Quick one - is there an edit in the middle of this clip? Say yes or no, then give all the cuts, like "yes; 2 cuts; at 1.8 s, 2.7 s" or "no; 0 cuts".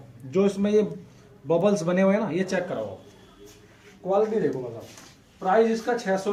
no; 0 cuts